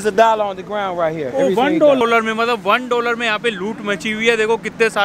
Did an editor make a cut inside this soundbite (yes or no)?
yes